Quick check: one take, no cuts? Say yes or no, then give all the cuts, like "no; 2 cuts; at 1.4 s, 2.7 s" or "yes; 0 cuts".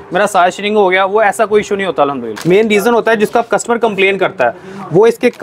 no; 1 cut; at 2.3 s